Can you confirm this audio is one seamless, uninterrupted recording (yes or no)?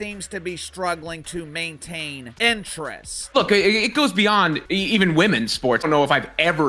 no